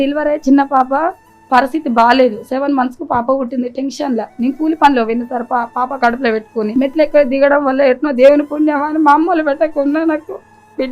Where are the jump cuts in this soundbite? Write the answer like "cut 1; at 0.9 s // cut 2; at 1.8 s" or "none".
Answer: cut 1; at 6.7 s

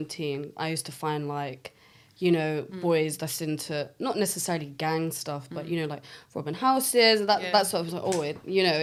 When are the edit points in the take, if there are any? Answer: none

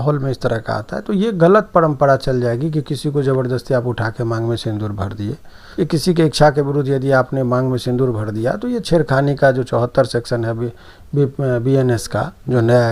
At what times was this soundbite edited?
cut 1; at 5.6 s

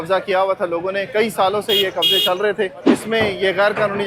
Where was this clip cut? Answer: cut 1; at 2.8 s

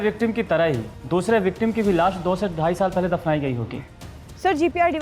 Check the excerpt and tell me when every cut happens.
cut 1; at 0.9 s // cut 2; at 3.9 s

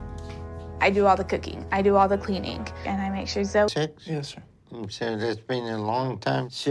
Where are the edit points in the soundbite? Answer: cut 1; at 3.7 s

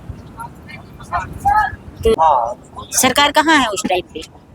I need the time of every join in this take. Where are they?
cut 1; at 2.1 s

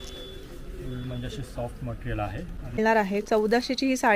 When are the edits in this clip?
cut 1; at 2.8 s

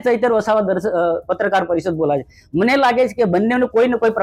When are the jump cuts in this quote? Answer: none

